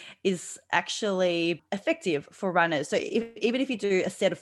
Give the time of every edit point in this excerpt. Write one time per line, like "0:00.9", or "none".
0:01.7